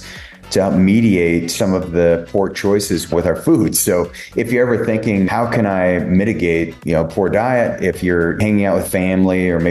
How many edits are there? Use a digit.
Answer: 5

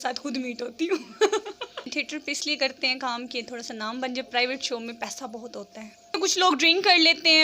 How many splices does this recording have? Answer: 2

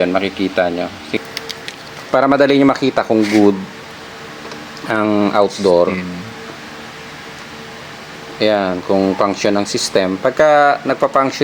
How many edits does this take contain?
1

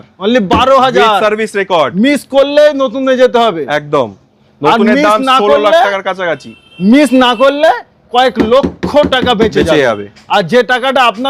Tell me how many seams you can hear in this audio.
0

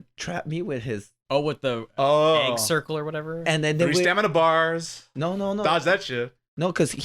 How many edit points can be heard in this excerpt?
1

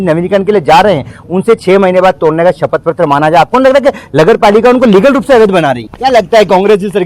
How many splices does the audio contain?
1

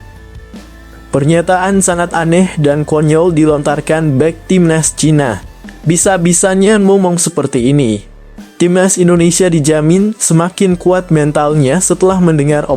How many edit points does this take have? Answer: 1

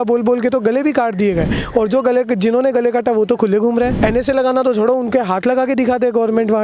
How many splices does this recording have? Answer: 1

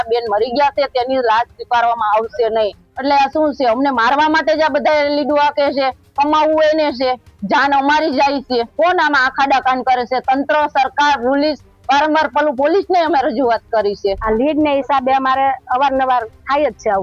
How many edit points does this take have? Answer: 3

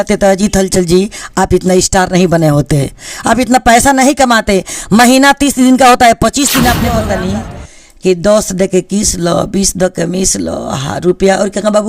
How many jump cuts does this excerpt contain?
1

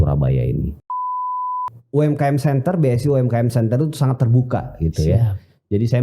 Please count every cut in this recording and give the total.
1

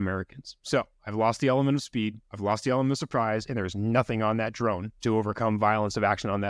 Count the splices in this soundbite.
2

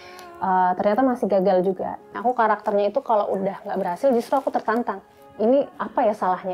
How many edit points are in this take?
2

